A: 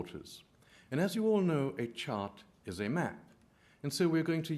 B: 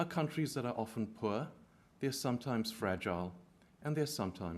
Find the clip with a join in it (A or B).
B